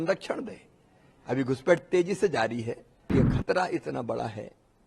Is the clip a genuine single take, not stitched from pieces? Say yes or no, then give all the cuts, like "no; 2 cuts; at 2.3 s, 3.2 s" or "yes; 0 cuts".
no; 1 cut; at 3.1 s